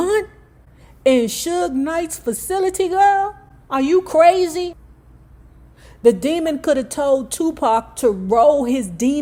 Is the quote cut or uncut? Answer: uncut